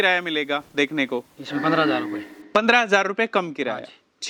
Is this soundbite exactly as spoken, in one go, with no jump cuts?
yes; 0 cuts

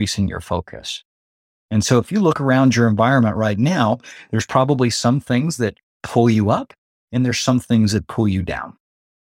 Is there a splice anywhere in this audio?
no; 0 cuts

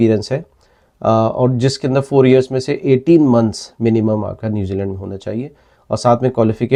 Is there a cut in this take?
no; 0 cuts

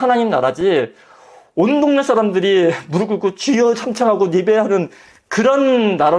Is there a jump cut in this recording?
no; 0 cuts

